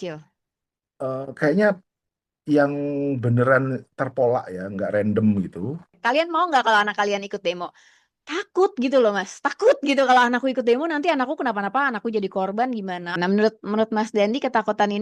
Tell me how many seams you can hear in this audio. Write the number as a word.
two